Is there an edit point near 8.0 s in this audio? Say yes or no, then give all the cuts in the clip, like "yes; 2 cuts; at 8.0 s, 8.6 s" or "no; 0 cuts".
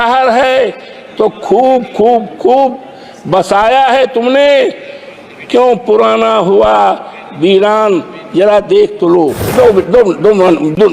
no; 1 cut; at 9.5 s